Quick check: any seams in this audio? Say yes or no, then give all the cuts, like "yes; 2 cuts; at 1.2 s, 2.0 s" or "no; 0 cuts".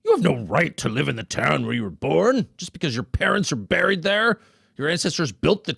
no; 0 cuts